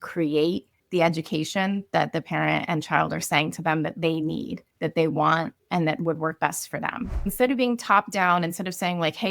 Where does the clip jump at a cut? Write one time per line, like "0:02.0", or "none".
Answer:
0:07.3